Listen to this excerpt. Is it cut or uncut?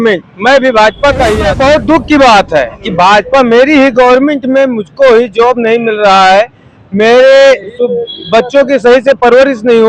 cut